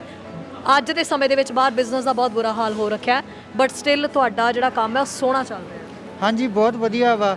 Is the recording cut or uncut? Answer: uncut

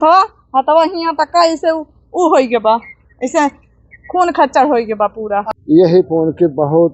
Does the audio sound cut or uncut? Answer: cut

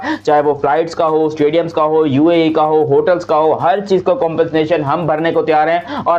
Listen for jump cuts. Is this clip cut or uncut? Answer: uncut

